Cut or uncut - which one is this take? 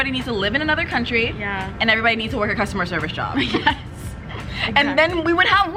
uncut